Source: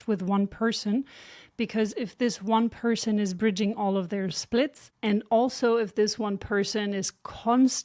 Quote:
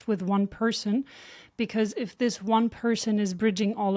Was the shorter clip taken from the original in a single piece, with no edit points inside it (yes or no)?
yes